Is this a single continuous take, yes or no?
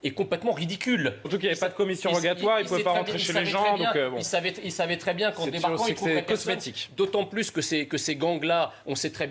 no